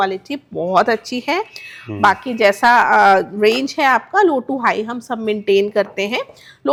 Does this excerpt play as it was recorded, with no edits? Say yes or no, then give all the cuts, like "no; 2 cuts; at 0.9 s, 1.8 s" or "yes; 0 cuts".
yes; 0 cuts